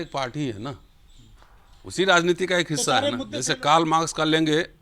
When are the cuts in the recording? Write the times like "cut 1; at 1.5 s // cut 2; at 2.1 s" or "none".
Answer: cut 1; at 3.3 s